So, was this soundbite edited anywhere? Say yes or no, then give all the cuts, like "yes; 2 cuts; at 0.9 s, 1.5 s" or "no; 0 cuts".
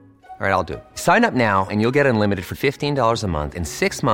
no; 0 cuts